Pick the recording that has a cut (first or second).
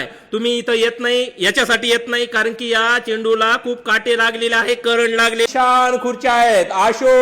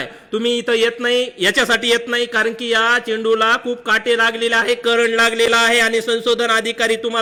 first